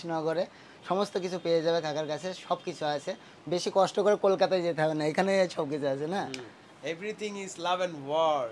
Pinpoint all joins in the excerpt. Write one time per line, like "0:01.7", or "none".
none